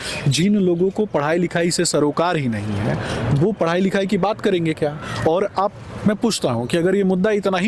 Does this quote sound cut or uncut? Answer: uncut